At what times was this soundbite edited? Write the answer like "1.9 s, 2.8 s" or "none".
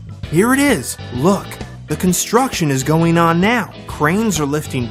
3.0 s